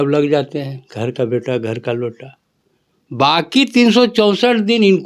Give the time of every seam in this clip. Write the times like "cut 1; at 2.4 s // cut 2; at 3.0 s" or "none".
none